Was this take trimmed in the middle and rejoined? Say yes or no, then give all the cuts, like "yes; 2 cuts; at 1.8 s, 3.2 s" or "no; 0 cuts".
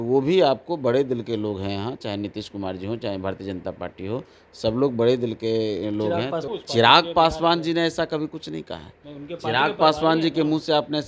yes; 1 cut; at 6.5 s